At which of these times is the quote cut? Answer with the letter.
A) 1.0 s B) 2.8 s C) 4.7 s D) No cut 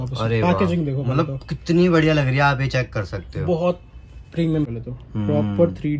C